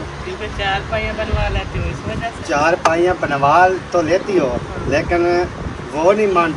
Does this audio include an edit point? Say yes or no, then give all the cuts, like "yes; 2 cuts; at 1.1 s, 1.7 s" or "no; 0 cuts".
no; 0 cuts